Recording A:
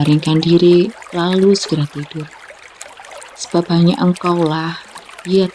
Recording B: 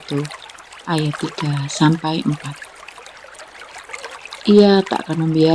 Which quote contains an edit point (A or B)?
B